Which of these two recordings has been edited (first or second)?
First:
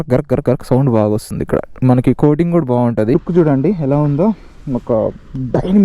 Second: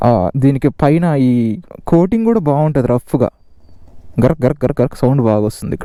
first